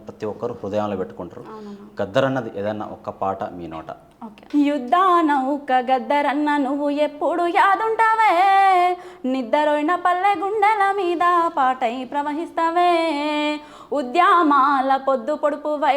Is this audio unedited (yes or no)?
yes